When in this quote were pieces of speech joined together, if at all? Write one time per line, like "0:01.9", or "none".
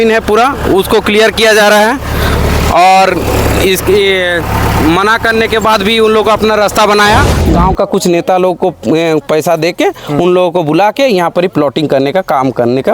0:07.4